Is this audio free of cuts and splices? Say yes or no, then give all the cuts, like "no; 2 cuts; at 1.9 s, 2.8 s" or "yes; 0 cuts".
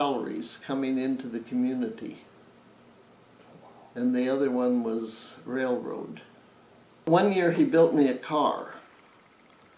no; 1 cut; at 7.1 s